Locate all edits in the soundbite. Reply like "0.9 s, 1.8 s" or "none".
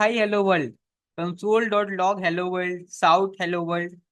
none